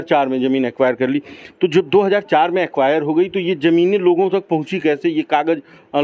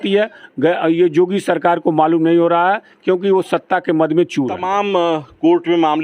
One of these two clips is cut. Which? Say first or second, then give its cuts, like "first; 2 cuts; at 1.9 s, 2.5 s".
second; 1 cut; at 4.6 s